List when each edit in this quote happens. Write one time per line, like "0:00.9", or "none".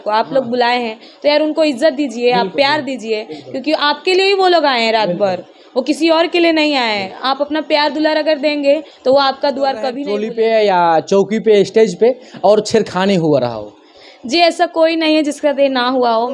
0:10.0